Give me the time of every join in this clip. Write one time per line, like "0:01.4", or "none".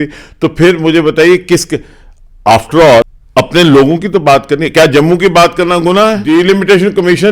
0:03.2
0:06.2